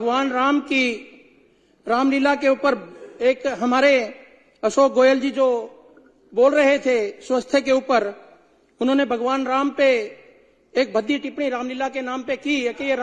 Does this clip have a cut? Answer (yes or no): no